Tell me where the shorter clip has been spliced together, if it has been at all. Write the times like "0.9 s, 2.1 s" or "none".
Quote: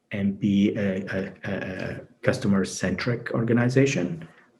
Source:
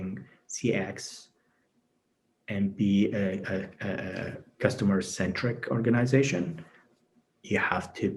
none